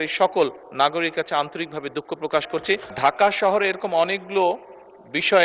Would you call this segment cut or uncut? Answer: cut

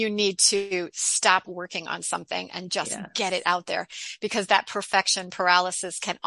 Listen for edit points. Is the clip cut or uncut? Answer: uncut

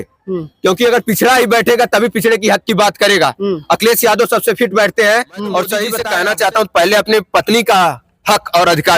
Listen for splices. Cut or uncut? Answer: cut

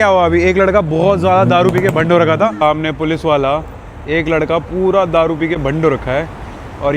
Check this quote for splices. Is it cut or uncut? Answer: cut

